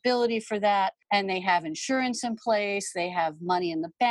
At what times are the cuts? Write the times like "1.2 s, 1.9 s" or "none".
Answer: 1.0 s